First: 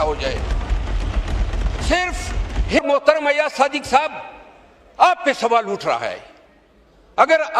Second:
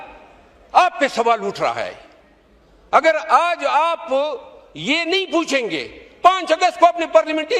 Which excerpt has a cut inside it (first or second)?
first